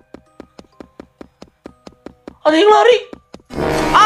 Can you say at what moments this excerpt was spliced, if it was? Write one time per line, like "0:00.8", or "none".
0:02.4